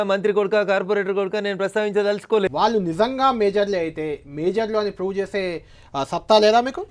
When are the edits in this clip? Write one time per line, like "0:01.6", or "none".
0:02.5